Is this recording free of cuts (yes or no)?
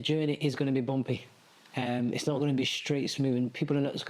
yes